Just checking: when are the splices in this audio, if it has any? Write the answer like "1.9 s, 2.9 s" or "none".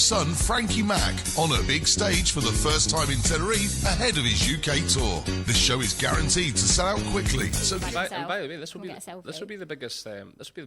7.8 s

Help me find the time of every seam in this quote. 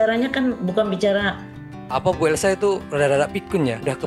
1.8 s

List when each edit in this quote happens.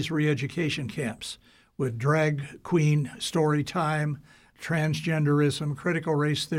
4.5 s

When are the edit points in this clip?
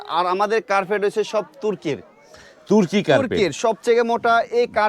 none

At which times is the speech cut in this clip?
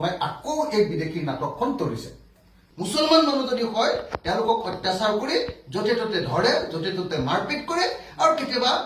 2.6 s

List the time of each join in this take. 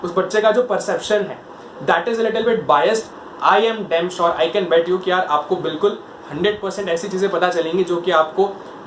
3.2 s

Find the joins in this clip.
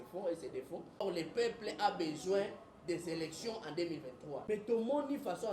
1.0 s, 4.4 s

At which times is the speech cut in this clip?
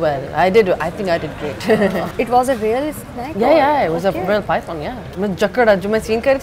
2.1 s, 5.0 s

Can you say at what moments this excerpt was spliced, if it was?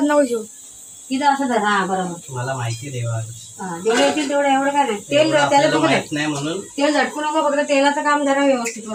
none

